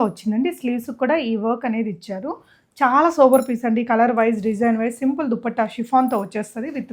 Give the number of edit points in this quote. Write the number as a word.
zero